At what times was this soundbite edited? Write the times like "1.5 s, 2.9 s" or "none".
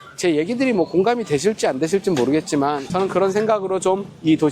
2.9 s